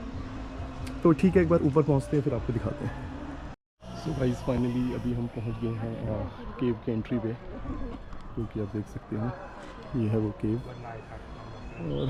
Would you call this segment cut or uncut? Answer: uncut